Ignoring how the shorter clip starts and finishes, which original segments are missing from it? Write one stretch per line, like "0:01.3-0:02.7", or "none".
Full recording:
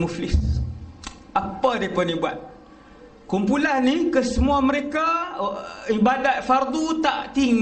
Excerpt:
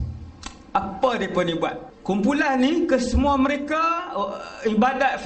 0:02.5-0:03.1